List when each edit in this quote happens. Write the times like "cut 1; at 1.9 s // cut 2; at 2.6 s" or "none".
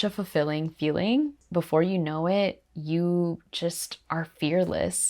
cut 1; at 1.4 s